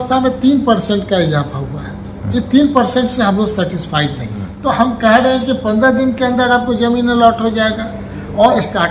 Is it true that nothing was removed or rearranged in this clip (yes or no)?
no